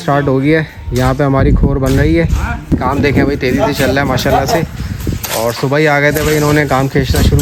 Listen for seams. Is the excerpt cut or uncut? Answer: uncut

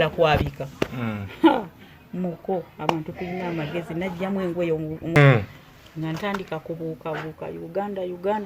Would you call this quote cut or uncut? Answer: uncut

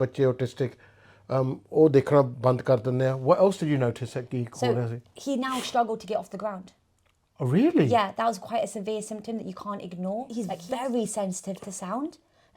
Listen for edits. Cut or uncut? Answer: cut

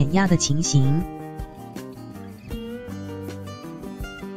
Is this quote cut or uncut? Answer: cut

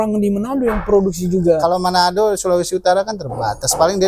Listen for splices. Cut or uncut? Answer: uncut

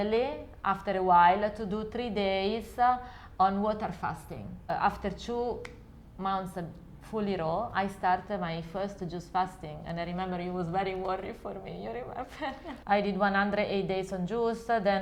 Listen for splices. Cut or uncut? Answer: cut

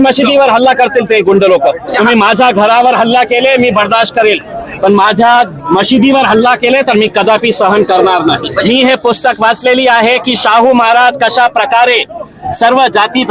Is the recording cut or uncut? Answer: cut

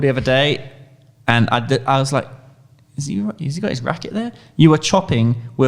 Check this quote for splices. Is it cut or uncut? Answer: uncut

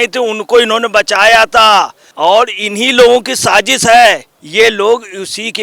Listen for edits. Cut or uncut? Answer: cut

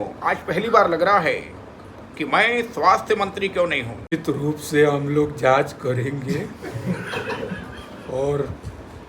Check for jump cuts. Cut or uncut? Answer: cut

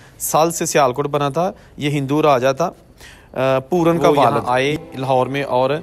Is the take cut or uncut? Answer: cut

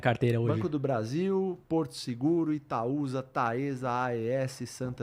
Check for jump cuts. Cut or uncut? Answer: uncut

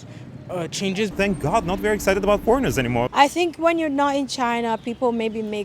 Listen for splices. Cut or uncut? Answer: cut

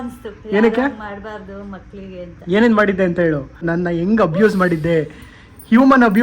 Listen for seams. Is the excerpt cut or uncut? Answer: cut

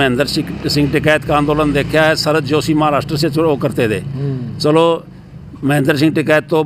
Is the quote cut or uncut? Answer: uncut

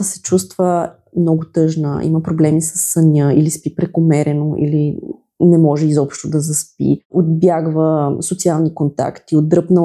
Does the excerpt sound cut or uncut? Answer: cut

